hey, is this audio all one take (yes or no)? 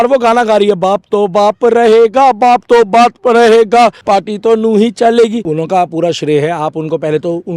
no